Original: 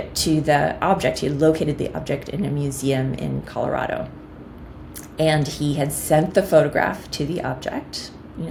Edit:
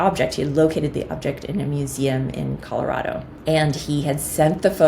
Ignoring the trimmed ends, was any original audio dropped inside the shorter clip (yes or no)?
yes